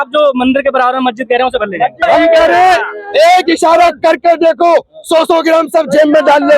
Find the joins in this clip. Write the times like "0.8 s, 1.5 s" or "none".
2.0 s